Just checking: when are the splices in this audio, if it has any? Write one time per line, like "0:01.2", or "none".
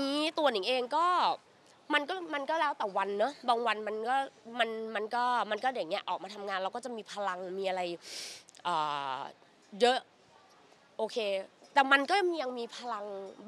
none